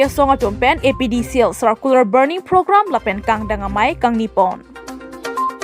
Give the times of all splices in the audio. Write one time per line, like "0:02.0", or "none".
0:04.7